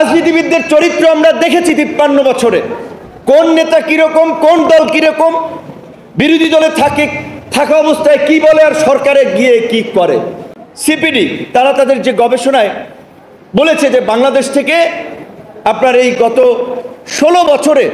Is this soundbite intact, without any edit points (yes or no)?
no